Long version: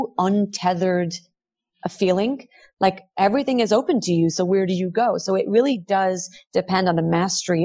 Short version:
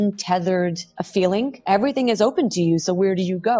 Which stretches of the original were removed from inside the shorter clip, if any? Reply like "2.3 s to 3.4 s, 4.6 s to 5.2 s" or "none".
1.3 s to 1.8 s, 2.4 s to 3.1 s